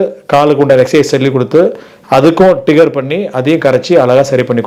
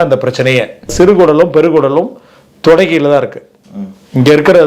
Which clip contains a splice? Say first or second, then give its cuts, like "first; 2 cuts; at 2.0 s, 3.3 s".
second; 1 cut; at 0.9 s